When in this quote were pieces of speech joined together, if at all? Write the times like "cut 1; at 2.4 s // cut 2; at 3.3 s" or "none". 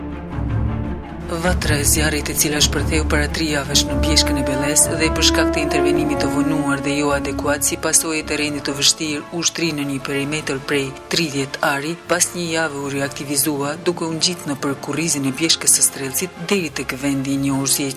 none